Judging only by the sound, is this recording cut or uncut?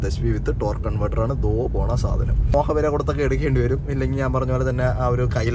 cut